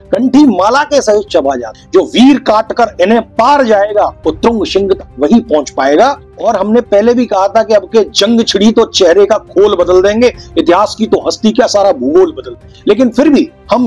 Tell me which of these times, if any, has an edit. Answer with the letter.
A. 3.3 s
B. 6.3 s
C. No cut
B